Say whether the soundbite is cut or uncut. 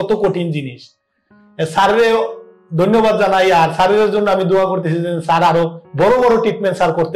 uncut